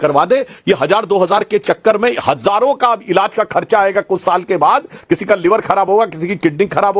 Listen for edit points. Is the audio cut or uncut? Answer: uncut